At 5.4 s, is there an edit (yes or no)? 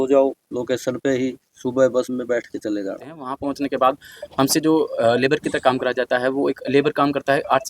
no